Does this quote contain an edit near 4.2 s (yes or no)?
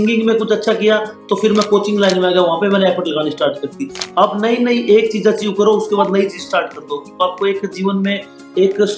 no